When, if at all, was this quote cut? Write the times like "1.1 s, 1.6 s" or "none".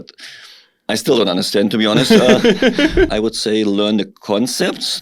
3.1 s